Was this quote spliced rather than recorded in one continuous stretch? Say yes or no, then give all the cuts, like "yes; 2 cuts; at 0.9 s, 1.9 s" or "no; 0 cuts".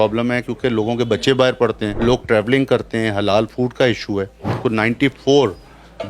yes; 2 cuts; at 1.9 s, 4.6 s